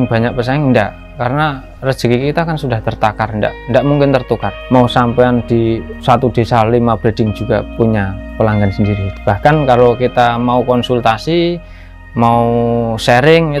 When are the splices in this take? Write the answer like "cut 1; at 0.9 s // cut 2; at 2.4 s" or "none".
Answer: cut 1; at 5.9 s // cut 2; at 7.8 s // cut 3; at 9.0 s